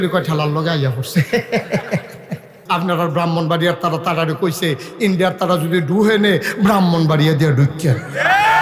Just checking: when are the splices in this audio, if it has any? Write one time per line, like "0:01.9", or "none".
0:02.6